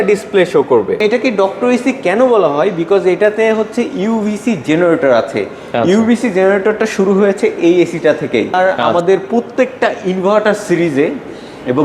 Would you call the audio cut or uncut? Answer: cut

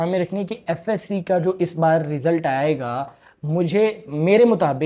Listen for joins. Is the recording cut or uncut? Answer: uncut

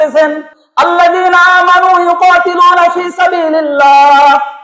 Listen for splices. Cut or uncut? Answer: uncut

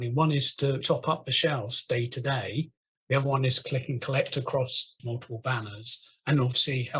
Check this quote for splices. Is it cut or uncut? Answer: cut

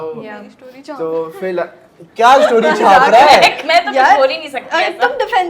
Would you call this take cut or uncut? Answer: uncut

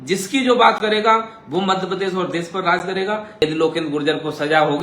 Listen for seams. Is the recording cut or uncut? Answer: cut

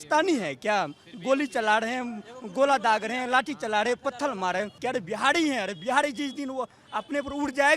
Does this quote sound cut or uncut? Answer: cut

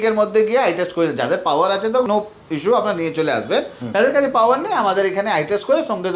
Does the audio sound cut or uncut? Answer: uncut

